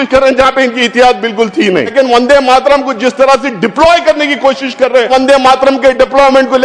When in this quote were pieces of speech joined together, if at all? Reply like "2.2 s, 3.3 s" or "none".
1.9 s, 5.1 s

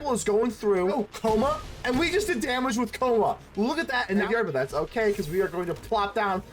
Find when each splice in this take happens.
0.9 s, 4.3 s

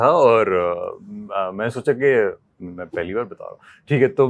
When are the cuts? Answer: none

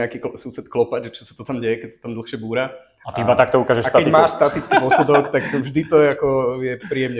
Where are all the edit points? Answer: none

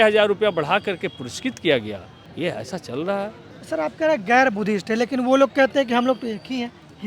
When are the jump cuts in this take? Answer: none

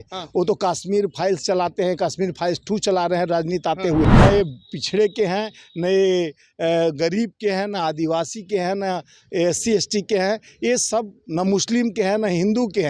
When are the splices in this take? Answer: 4.1 s

